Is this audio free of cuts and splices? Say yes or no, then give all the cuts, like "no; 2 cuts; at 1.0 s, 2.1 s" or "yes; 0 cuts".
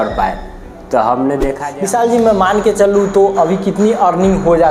no; 1 cut; at 1.7 s